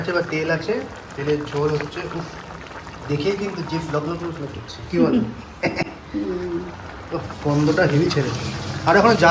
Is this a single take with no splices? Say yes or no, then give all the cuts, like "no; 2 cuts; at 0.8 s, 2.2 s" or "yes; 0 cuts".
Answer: yes; 0 cuts